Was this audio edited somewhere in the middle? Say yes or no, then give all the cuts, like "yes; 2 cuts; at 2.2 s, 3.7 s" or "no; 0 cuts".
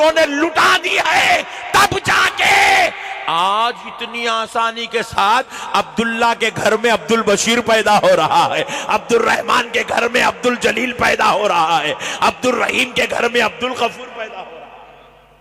no; 0 cuts